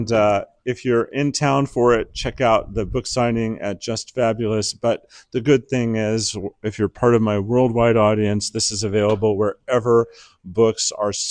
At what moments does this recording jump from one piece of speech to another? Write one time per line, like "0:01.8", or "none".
none